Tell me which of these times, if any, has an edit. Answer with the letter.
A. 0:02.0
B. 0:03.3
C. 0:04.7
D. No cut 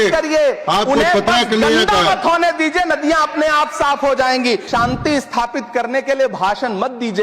C